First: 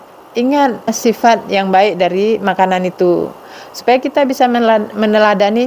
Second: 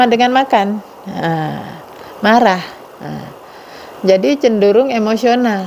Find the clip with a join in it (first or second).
first